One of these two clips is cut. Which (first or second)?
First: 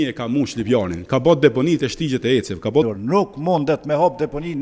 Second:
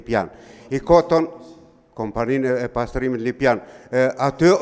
first